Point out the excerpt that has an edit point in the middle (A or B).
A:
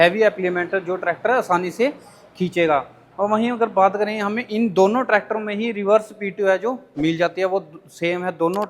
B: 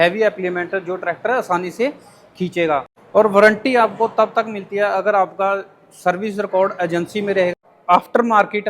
B